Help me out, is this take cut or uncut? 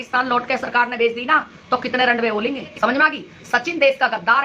cut